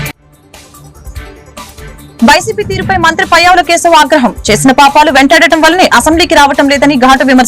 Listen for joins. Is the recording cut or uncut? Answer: cut